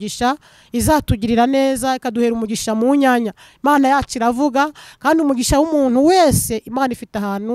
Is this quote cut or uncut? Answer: uncut